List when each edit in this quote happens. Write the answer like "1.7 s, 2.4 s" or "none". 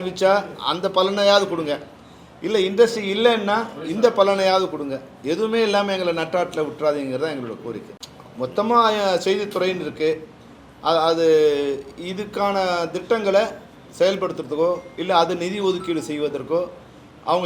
none